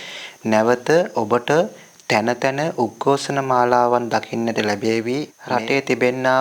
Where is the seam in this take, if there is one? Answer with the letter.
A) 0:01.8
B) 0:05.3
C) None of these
B